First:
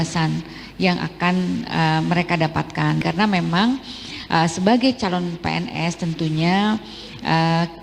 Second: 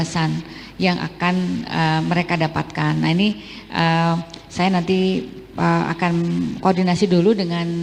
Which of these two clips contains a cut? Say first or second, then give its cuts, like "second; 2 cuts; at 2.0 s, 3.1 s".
first; 1 cut; at 3.0 s